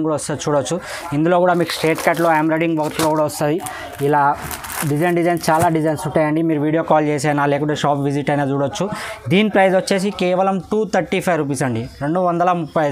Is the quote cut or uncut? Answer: uncut